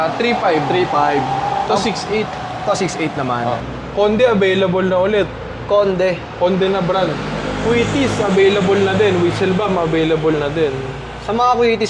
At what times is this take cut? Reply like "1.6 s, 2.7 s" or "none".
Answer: 3.7 s